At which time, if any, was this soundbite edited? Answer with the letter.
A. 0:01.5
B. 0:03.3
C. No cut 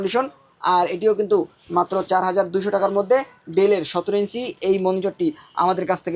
C